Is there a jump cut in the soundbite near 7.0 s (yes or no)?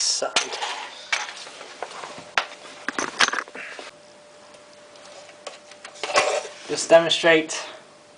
yes